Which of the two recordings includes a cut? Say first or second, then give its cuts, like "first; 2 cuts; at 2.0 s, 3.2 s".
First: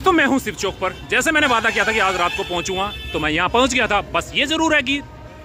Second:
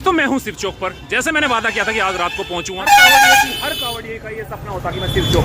second; 1 cut; at 2.8 s